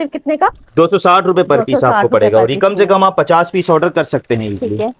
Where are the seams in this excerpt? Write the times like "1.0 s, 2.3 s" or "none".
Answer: none